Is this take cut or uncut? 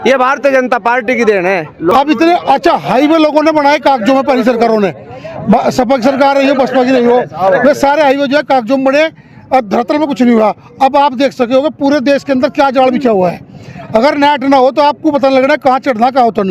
cut